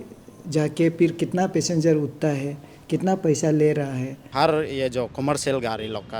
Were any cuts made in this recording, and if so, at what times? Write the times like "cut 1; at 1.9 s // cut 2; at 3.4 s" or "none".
cut 1; at 4.3 s

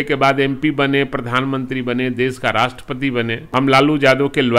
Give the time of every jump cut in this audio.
cut 1; at 3.4 s

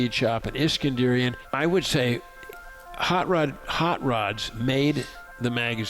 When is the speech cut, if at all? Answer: cut 1; at 1.4 s

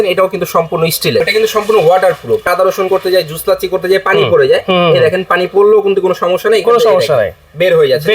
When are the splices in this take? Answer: cut 1; at 1.2 s // cut 2; at 2.4 s

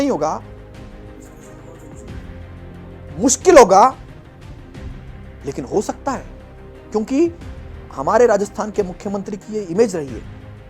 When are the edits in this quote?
cut 1; at 4.0 s // cut 2; at 5.4 s

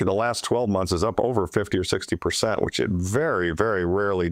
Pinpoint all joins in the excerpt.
none

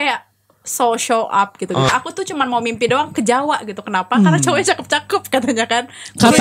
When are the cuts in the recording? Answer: cut 1; at 1.9 s

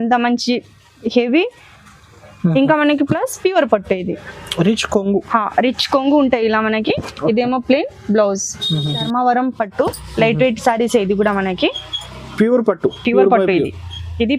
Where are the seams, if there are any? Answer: cut 1; at 9.1 s

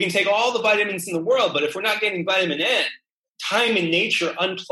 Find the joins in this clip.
cut 1; at 3.1 s

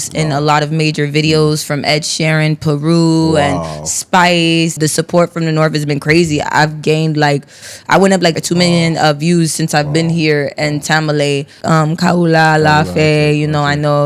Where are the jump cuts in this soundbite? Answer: cut 1; at 4.7 s // cut 2; at 11.6 s

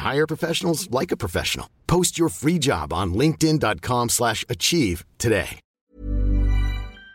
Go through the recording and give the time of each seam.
cut 1; at 5.6 s

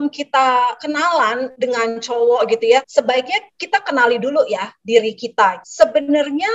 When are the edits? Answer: cut 1; at 0.8 s // cut 2; at 2.9 s // cut 3; at 5.6 s

